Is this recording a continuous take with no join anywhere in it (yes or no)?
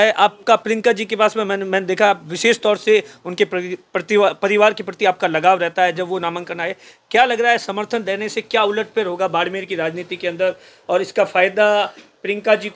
yes